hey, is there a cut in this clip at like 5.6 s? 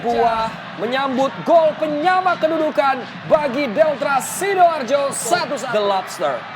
yes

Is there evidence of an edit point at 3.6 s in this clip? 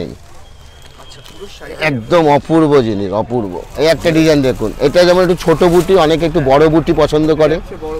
yes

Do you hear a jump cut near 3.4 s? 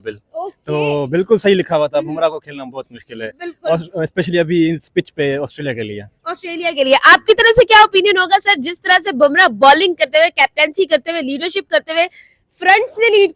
no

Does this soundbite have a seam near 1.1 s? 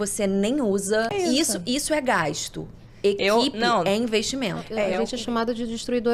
yes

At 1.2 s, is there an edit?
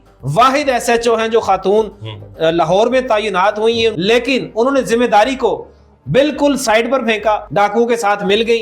no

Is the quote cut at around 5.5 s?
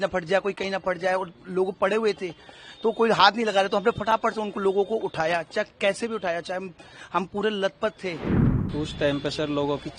no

